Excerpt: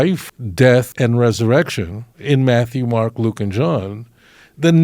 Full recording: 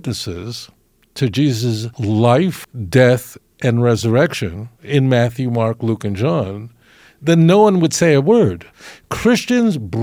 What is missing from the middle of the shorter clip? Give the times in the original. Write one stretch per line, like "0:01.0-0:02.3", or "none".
0:03.3-0:03.6